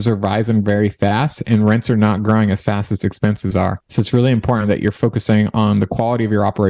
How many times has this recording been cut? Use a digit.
1